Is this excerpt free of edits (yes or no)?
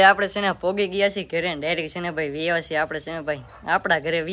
yes